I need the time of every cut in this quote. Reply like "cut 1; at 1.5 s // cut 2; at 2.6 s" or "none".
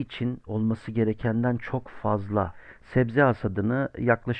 cut 1; at 2.6 s